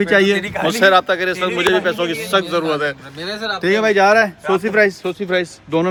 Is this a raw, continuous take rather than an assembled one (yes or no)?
yes